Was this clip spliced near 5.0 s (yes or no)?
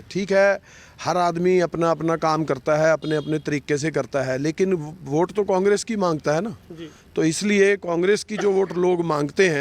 no